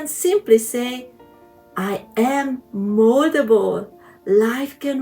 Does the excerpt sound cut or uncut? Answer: uncut